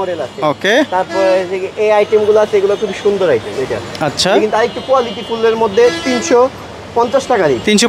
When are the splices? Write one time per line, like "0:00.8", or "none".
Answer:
none